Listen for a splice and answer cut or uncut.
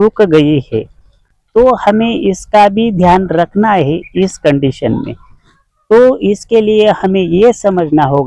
uncut